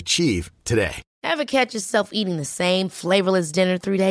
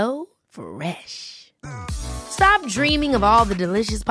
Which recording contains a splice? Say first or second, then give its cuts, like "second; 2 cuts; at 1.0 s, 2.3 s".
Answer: first; 1 cut; at 1.1 s